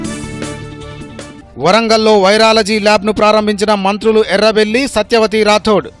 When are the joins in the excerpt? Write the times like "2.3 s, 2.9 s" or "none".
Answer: 1.3 s